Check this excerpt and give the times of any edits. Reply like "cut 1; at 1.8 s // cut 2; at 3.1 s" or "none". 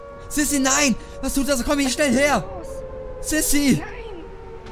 cut 1; at 3.8 s